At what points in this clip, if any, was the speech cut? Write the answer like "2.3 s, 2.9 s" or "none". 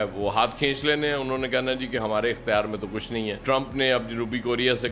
3.4 s